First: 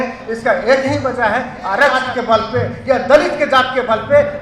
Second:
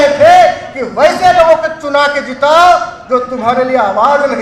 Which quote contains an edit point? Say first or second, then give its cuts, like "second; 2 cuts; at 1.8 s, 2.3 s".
first; 1 cut; at 2.1 s